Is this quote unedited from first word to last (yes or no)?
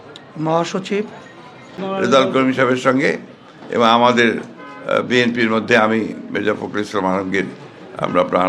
no